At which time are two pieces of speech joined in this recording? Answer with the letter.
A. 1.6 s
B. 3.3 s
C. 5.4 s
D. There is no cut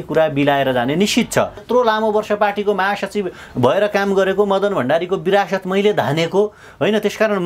A